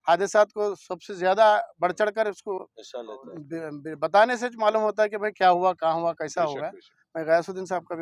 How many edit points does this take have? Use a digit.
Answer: 0